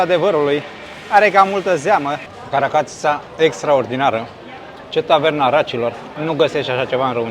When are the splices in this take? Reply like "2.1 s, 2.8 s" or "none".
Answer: 2.3 s, 6.1 s